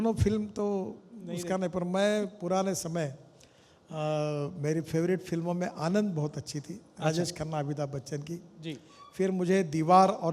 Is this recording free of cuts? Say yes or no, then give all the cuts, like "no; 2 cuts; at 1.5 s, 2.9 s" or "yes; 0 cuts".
yes; 0 cuts